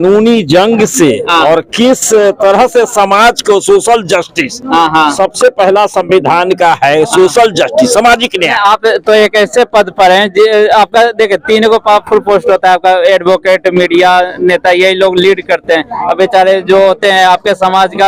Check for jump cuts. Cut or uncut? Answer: uncut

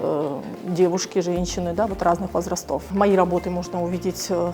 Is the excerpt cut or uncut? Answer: cut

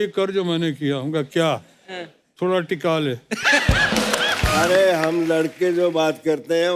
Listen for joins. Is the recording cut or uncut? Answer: cut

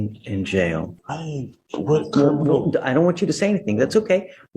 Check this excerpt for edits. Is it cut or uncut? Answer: cut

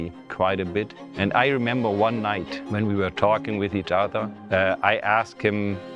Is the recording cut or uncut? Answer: cut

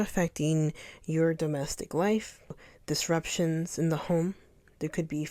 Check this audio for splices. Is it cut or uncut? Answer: cut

